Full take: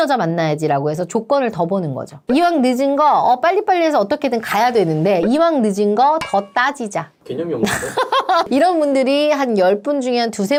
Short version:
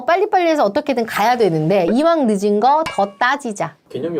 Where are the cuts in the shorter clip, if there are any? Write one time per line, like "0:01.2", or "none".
none